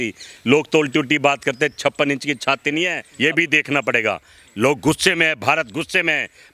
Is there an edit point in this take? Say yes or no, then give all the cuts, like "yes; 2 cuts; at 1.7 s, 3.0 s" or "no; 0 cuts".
no; 0 cuts